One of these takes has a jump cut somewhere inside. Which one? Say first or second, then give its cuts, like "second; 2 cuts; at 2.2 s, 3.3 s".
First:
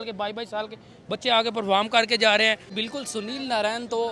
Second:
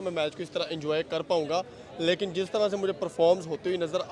first; 1 cut; at 2.7 s